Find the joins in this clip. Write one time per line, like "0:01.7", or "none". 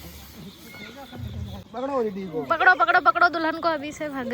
0:01.7